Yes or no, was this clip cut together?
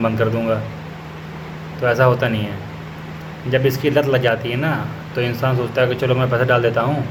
no